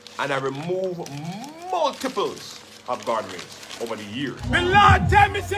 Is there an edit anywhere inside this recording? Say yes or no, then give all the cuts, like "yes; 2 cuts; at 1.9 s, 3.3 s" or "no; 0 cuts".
yes; 1 cut; at 4.4 s